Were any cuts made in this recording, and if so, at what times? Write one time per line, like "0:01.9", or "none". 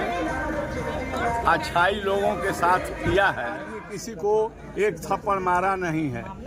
0:03.7